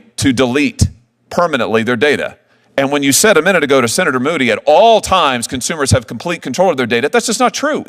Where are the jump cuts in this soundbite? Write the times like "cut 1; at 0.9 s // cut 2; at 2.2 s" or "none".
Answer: none

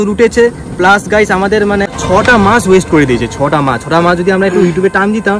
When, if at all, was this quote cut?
cut 1; at 2.0 s

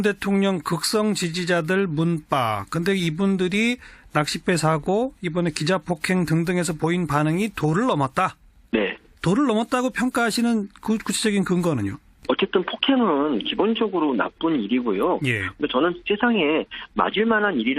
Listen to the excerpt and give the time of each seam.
cut 1; at 7.8 s

